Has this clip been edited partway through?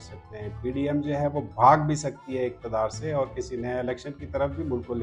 no; 0 cuts

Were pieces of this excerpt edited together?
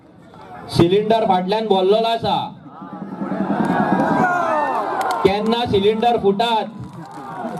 no; 0 cuts

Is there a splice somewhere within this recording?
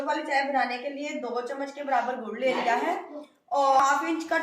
no; 0 cuts

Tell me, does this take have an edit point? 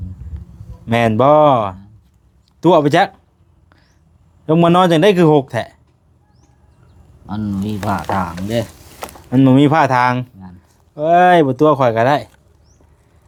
no; 0 cuts

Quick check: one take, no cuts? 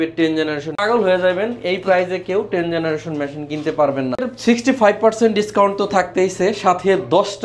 no; 2 cuts; at 0.8 s, 4.3 s

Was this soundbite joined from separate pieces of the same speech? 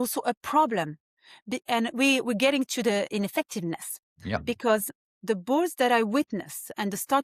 no; 0 cuts

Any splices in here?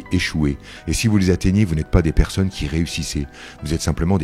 no; 0 cuts

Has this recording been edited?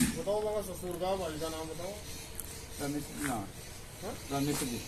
no; 0 cuts

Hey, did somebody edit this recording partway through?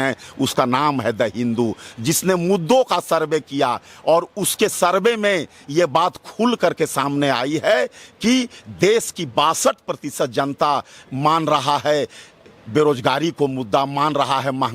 no; 0 cuts

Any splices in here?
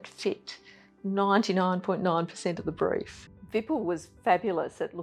yes; 1 cut; at 3.2 s

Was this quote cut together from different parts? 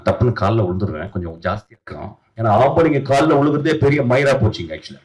yes; 1 cut; at 2.2 s

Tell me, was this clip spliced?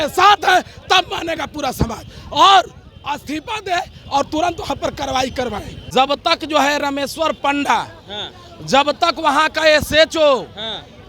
yes; 1 cut; at 5.7 s

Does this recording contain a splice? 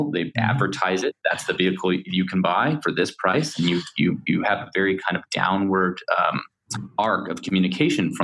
no; 0 cuts

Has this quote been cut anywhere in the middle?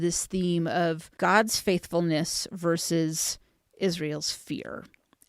yes; 1 cut; at 1.1 s

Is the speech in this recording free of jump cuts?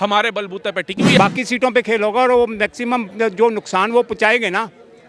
no; 1 cut; at 1.2 s

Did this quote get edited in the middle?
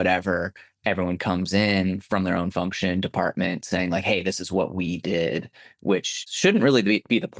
yes; 1 cut; at 6.2 s

